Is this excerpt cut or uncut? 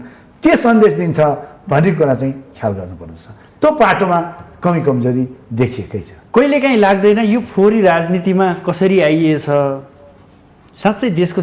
uncut